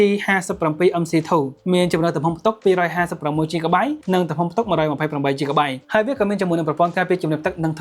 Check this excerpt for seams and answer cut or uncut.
cut